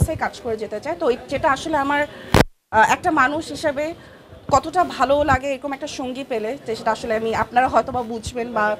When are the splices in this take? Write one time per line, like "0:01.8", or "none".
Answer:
none